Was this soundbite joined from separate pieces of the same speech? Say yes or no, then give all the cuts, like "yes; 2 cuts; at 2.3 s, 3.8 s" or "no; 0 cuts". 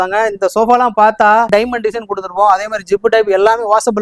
yes; 1 cut; at 1.5 s